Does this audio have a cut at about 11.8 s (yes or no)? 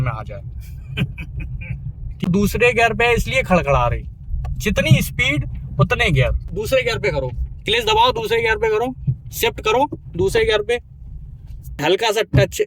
yes